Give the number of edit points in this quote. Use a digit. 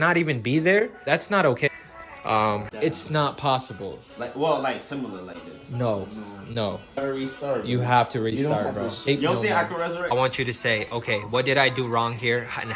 4